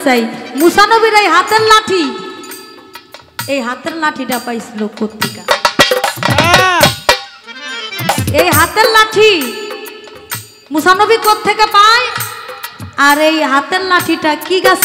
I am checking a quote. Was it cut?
no; 0 cuts

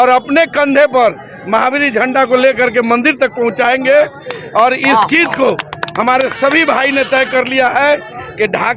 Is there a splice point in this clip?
no; 0 cuts

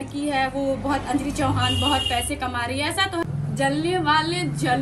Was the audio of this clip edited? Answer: yes; 1 cut; at 3.2 s

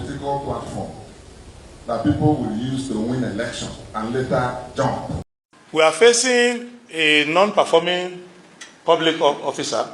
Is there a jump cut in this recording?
yes; 1 cut; at 5.2 s

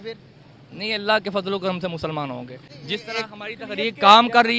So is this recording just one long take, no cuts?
yes; 0 cuts

